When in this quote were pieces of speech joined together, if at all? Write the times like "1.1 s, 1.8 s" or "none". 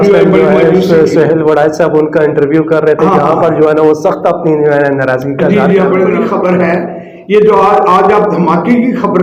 6.2 s